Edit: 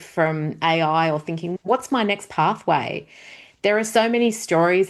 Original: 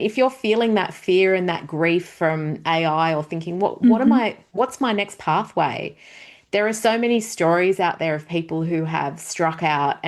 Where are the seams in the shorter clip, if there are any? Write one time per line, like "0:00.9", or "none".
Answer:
0:01.5